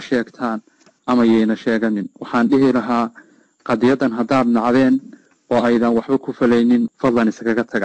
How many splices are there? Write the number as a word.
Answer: one